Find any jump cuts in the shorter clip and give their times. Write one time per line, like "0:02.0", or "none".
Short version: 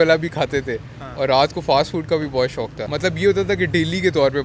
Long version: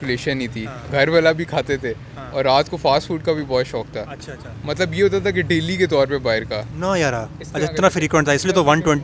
0:02.8